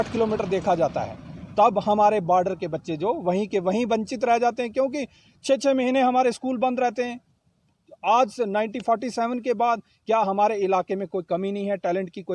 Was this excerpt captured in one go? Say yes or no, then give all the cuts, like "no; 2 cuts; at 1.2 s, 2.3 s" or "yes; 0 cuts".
yes; 0 cuts